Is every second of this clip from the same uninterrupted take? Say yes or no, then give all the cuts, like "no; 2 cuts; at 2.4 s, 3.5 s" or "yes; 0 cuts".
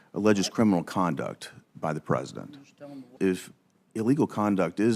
no; 1 cut; at 3.1 s